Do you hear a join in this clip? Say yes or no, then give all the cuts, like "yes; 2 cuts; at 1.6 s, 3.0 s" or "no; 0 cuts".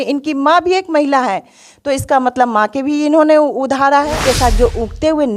yes; 1 cut; at 4.1 s